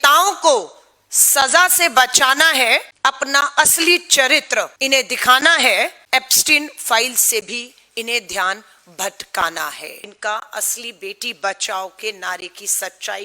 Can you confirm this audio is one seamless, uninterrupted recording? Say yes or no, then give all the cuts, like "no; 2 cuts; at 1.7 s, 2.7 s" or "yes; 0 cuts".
no; 4 cuts; at 2.9 s, 4.8 s, 6.0 s, 10.0 s